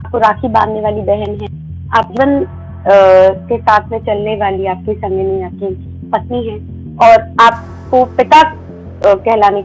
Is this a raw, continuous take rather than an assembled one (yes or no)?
yes